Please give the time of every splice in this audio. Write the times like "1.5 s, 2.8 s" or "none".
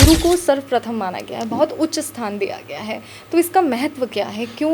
none